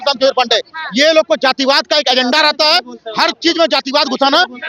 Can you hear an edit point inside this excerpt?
no; 0 cuts

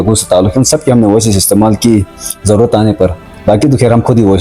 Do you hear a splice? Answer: no; 0 cuts

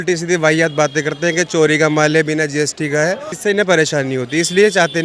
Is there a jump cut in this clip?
yes; 1 cut; at 3.3 s

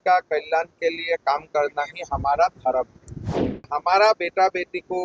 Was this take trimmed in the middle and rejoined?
yes; 1 cut; at 3.6 s

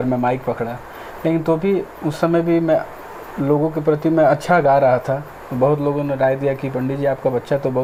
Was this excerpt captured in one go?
yes; 0 cuts

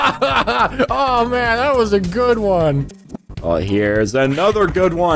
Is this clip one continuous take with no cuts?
yes; 0 cuts

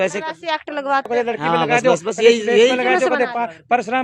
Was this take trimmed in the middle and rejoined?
yes; 1 cut; at 2.9 s

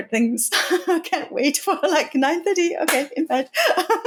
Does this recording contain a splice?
no; 0 cuts

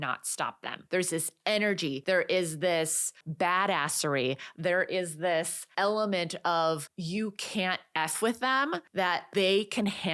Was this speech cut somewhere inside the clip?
yes; 4 cuts; at 2.0 s, 5.6 s, 6.9 s, 9.1 s

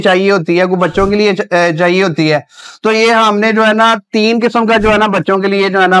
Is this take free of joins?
yes; 0 cuts

